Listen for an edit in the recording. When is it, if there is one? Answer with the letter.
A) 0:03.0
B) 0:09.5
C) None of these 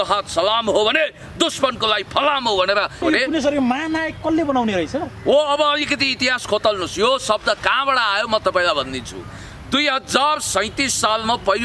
A